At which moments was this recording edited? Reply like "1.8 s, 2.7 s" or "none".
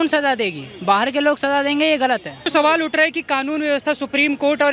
2.4 s